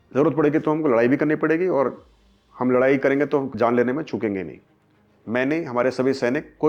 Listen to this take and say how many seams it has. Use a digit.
0